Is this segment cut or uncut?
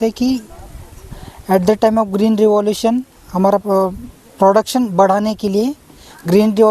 uncut